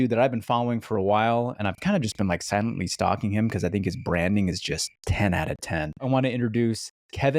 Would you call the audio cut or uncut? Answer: cut